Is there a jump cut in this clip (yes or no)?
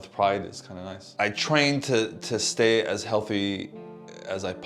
yes